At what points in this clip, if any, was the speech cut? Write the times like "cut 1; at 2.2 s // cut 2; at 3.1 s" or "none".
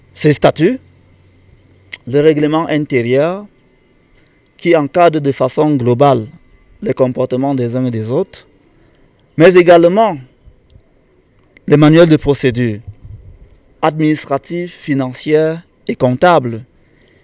none